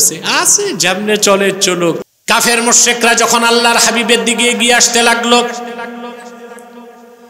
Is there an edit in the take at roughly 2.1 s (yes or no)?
yes